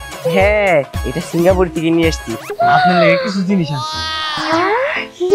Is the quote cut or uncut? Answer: cut